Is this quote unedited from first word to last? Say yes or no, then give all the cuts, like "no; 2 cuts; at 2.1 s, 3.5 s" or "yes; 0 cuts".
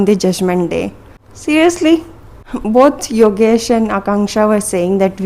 yes; 0 cuts